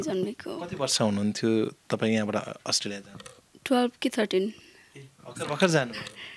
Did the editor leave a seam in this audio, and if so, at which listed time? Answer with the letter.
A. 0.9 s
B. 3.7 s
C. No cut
C